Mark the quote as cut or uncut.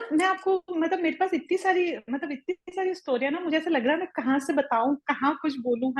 uncut